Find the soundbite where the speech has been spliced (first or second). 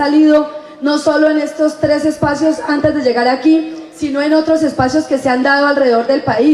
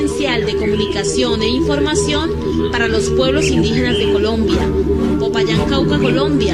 second